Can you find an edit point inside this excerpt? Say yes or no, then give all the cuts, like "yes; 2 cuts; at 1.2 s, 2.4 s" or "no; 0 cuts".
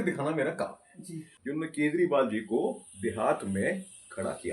yes; 1 cut; at 1.3 s